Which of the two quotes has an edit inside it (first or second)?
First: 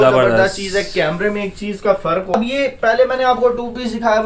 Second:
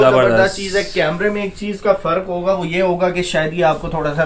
first